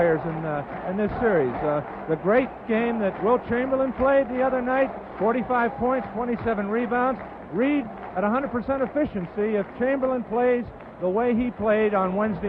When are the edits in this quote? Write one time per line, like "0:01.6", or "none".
0:04.6